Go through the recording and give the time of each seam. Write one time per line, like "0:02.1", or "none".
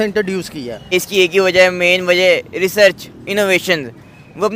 0:00.9

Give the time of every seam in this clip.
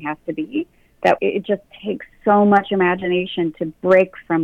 0:01.2
0:03.6

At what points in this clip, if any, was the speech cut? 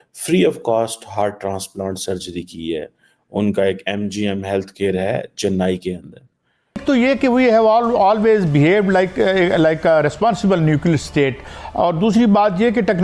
0:06.8

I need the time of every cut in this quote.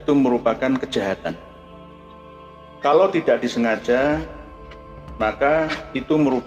none

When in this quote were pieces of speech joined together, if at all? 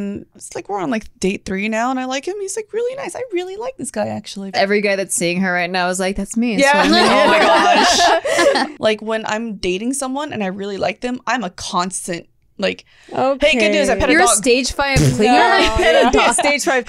0:01.1
0:04.6
0:08.7

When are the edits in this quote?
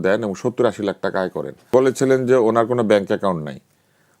0:01.6

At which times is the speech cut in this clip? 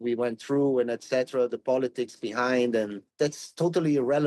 0:03.0

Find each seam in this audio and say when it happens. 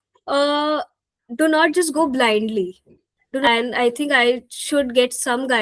0:03.5

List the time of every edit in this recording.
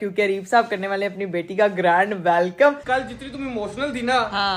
0:02.8

